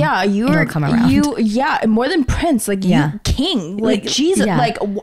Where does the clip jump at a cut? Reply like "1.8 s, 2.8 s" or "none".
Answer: none